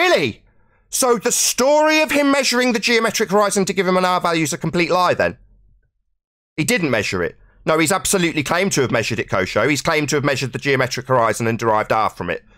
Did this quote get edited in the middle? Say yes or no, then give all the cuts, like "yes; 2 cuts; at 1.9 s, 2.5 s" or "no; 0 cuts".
no; 0 cuts